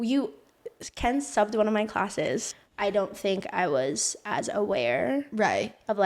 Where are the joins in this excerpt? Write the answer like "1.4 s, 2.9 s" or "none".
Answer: 2.5 s